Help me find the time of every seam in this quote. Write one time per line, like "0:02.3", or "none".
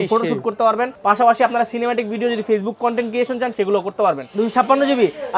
0:00.9
0:04.2